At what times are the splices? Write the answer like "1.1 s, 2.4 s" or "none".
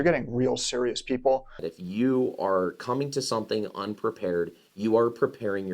1.6 s